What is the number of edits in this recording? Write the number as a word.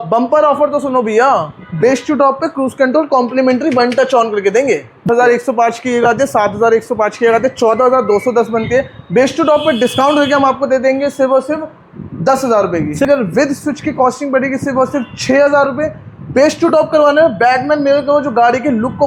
two